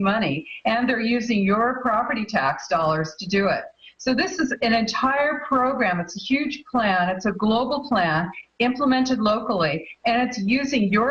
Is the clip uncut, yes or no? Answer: no